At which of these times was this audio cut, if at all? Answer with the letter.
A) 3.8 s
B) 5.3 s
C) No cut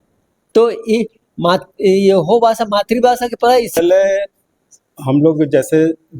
A